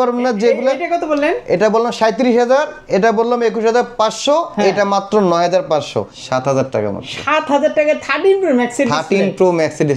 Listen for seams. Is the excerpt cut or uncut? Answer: cut